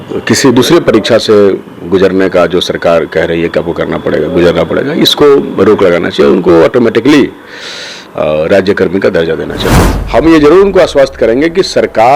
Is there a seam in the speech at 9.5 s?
yes; 1 cut; at 9.5 s

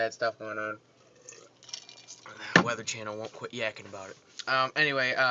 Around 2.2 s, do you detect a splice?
yes; 1 cut; at 2.2 s

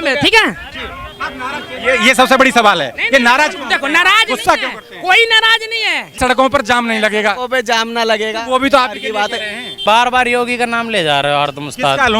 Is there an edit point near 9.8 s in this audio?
yes; 2 cuts; at 6.2 s, 9.8 s

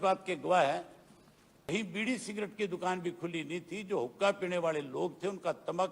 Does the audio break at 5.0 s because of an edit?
no; 1 cut; at 1.7 s

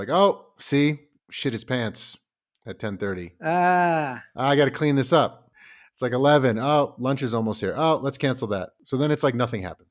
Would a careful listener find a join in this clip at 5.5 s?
no; 0 cuts

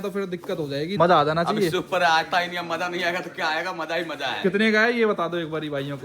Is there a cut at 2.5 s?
no; 1 cut; at 0.9 s

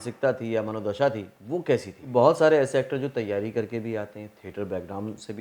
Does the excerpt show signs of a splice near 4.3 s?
no; 1 cut; at 2.0 s

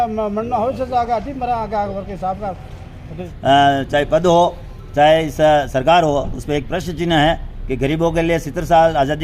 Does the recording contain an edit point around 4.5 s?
no; 1 cut; at 3.3 s

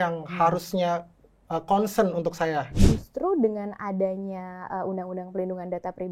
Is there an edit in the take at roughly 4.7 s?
no; 1 cut; at 2.7 s

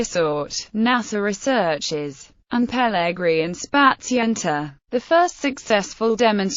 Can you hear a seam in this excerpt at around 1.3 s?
no; 1 cut; at 2.5 s

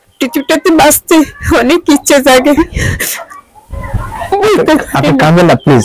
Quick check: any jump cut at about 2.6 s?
yes; 1 cut; at 2.6 s

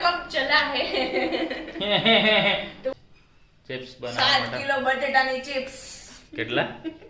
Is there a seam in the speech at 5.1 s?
no; 1 cut; at 3.1 s

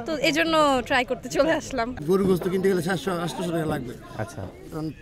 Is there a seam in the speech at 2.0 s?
yes; 1 cut; at 2.0 s

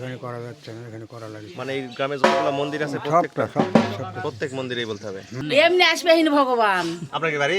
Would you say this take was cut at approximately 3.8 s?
no; 1 cut; at 5.4 s

